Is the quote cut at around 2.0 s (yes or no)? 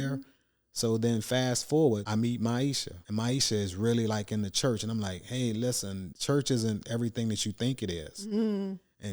yes